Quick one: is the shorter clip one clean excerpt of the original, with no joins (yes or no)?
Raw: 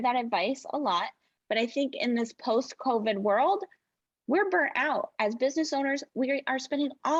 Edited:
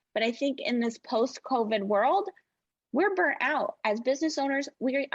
yes